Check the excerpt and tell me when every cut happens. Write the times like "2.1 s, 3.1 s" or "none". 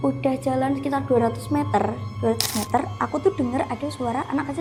none